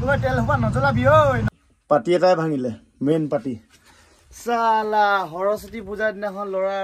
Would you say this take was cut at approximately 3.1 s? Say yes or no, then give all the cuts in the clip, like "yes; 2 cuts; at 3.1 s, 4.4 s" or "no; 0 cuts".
no; 1 cut; at 1.5 s